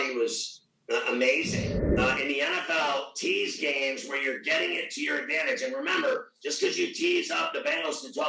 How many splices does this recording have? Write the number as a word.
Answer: one